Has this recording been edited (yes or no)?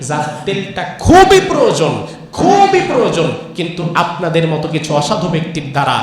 no